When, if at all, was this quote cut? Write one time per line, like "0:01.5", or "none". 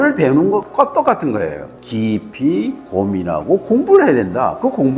0:01.9